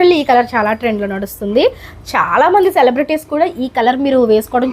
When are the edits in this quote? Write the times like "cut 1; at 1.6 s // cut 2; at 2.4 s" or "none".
none